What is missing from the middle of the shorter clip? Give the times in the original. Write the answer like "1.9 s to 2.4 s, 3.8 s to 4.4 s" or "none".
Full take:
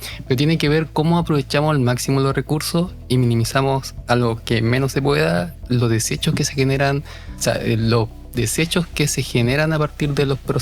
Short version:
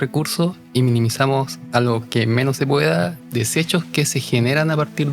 5.6 s to 8.2 s